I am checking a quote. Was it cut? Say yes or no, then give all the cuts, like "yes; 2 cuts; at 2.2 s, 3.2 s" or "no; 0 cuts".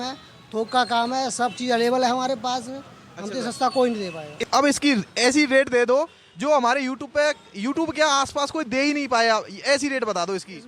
yes; 1 cut; at 4.5 s